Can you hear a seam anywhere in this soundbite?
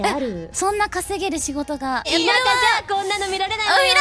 yes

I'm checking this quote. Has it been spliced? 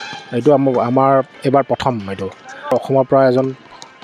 yes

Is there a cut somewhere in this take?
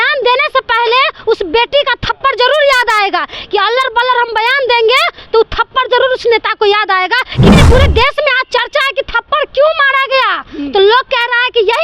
yes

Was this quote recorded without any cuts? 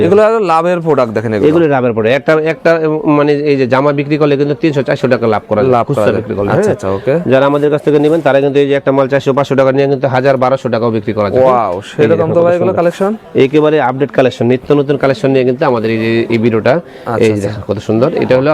yes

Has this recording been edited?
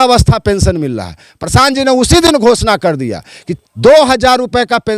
no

